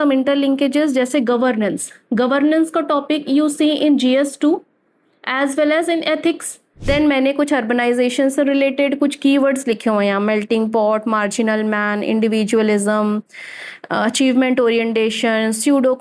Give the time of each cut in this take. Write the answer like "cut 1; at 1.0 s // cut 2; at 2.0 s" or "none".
cut 1; at 6.9 s